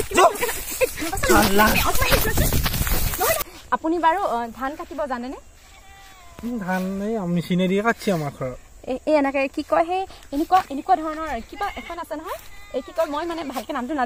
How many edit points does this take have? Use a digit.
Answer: 1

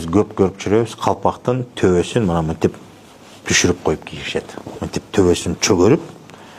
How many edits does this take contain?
0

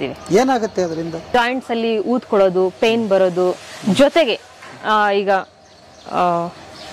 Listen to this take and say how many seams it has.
1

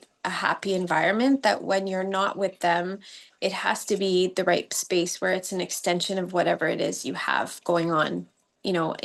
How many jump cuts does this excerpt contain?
0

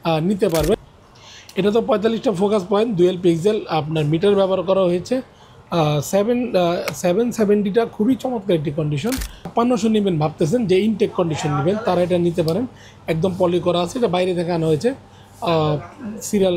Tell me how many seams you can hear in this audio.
2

